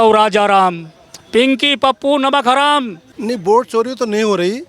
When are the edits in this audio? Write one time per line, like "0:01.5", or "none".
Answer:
0:03.0